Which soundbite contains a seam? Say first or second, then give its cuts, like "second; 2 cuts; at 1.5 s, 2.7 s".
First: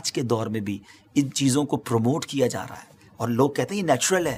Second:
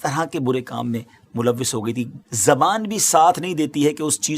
second; 1 cut; at 2.2 s